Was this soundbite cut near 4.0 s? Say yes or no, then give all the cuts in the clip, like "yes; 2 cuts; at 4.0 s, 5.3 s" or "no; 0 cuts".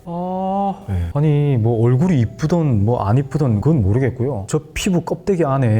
no; 1 cut; at 1.0 s